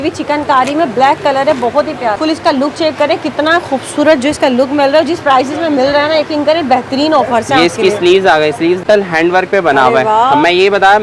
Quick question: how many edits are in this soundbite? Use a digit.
2